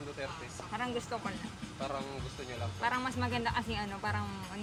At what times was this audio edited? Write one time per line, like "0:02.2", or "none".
none